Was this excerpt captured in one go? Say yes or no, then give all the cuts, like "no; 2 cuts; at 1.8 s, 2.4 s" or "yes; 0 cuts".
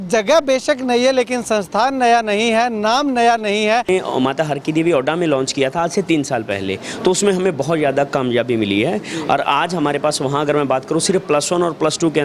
no; 1 cut; at 3.9 s